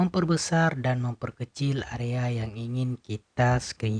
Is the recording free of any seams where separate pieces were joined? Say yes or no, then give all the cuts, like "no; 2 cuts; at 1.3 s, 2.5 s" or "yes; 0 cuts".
yes; 0 cuts